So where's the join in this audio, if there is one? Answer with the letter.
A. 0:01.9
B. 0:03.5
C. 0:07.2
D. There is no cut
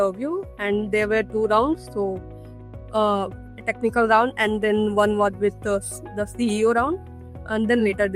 D